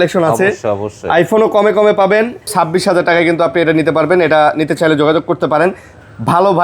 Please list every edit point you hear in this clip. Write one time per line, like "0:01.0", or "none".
0:02.5